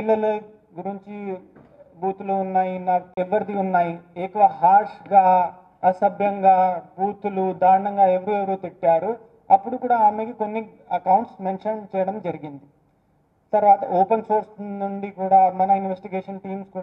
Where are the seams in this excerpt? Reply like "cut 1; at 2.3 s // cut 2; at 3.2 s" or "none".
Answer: cut 1; at 3.1 s